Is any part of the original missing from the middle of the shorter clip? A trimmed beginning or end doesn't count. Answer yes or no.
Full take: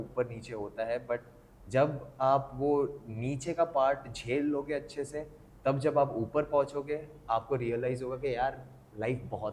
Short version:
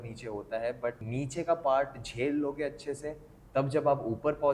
yes